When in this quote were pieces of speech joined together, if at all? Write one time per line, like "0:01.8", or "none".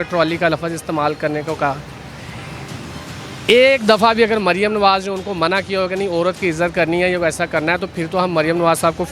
none